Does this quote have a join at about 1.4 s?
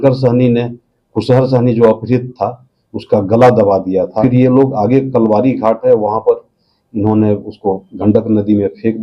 no; 1 cut; at 4.2 s

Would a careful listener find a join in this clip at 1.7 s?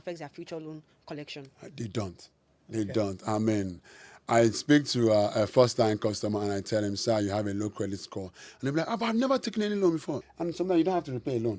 no; 1 cut; at 10.3 s

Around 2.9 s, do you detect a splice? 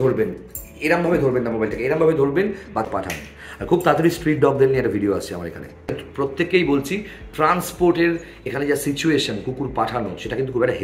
yes; 2 cuts; at 2.9 s, 6.0 s

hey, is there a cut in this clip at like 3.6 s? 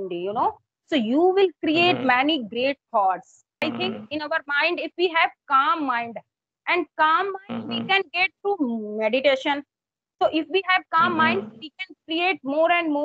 yes; 1 cut; at 3.6 s

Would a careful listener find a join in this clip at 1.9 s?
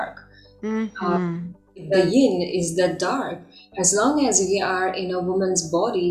yes; 1 cut; at 1.9 s

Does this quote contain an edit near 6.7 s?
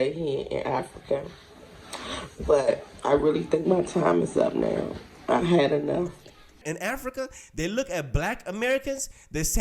yes; 1 cut; at 6.7 s

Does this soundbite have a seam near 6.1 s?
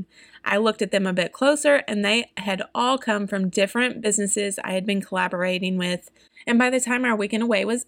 yes; 1 cut; at 6.1 s

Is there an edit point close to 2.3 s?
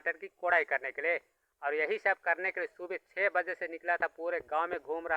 no; 0 cuts

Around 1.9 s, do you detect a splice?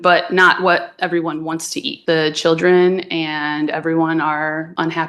yes; 1 cut; at 1.9 s

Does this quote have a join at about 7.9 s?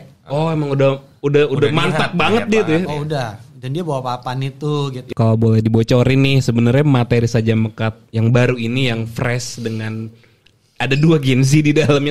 no; 1 cut; at 5.1 s

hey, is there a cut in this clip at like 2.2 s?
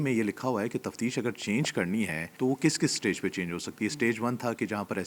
yes; 1 cut; at 2.2 s

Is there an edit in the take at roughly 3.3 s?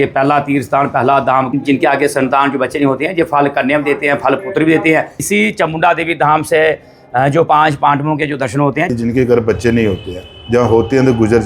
no; 3 cuts; at 1.5 s, 5.1 s, 8.9 s

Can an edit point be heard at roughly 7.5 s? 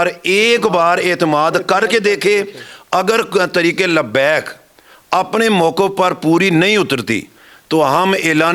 no; 0 cuts

